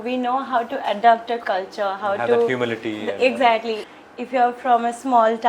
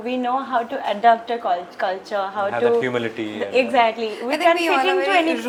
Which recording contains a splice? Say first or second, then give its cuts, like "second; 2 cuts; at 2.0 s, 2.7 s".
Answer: first; 2 cuts; at 1.4 s, 3.8 s